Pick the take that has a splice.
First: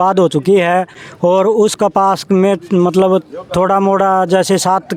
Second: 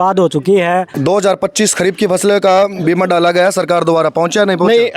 second; 1 cut; at 0.9 s

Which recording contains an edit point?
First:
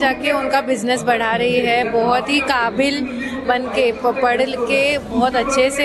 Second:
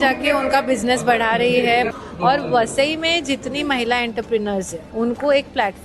second; 2 cuts; at 1.9 s, 4.8 s

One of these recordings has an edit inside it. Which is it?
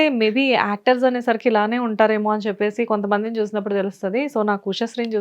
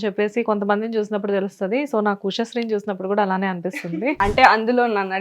second; 1 cut; at 3.7 s

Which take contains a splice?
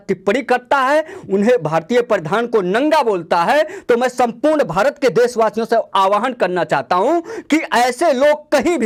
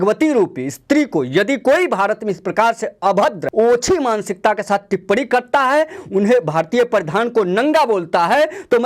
second; 1 cut; at 3.4 s

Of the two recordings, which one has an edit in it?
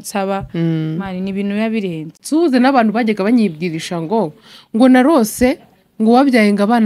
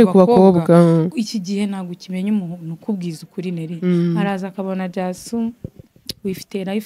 first; 1 cut; at 2.2 s

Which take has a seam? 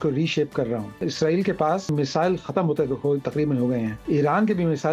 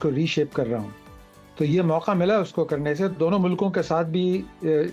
first; 3 cuts; at 1.0 s, 1.9 s, 4.0 s

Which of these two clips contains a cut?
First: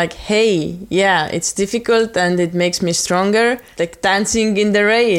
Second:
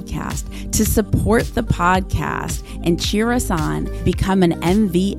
first; 1 cut; at 3.7 s

